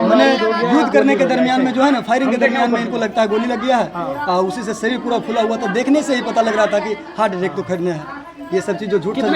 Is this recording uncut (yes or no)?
yes